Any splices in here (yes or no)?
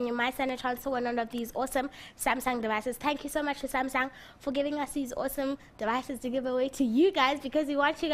yes